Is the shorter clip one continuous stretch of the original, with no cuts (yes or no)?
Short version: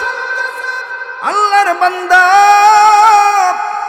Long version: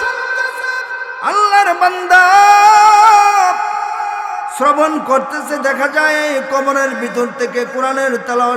yes